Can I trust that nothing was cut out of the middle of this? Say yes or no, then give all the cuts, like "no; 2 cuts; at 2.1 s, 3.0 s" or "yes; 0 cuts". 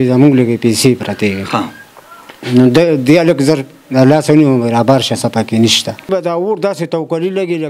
no; 1 cut; at 6.1 s